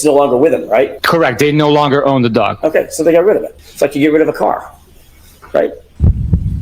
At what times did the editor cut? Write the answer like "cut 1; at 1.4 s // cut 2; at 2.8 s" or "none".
cut 1; at 1.0 s